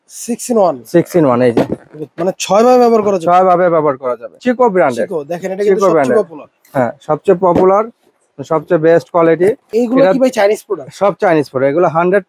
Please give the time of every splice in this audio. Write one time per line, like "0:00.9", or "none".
0:04.4
0:09.6